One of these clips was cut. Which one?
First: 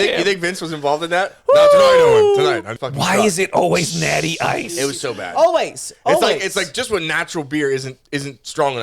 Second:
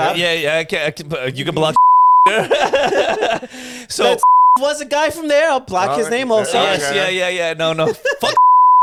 first; 1 cut; at 2.7 s

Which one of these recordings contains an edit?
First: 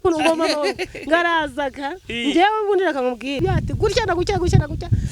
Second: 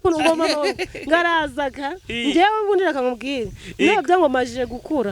first; 1 cut; at 3.4 s

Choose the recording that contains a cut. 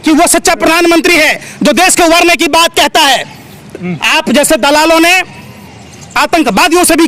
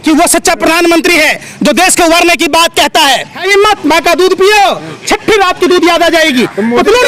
second; 1 cut; at 3.3 s

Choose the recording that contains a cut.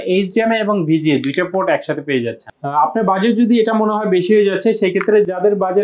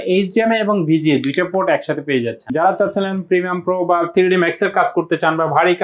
second; 1 cut; at 2.5 s

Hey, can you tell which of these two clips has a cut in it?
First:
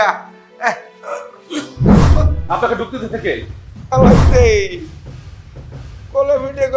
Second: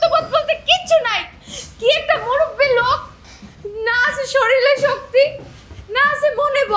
first; 1 cut; at 3.9 s

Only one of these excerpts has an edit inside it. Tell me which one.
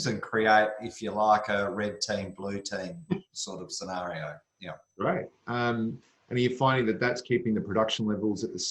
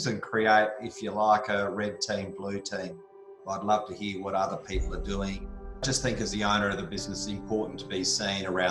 second; 2 cuts; at 3.4 s, 5.8 s

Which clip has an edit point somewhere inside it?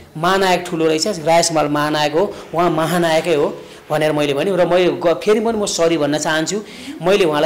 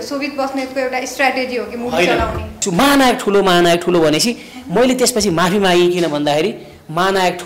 second; 1 cut; at 2.6 s

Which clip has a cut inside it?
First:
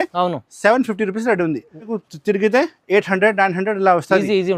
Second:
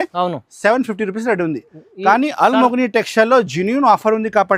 first; 1 cut; at 1.9 s

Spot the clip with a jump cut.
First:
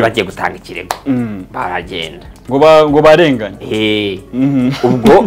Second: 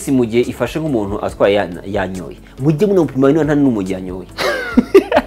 first; 1 cut; at 2.3 s

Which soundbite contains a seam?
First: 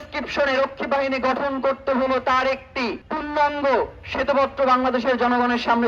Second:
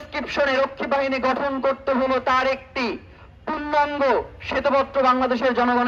first; 1 cut; at 3.0 s

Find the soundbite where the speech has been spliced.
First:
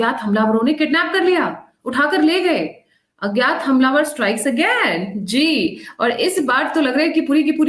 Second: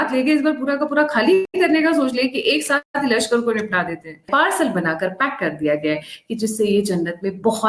second; 3 cuts; at 1.5 s, 2.9 s, 4.3 s

